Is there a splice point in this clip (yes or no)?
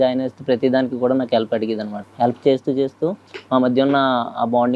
yes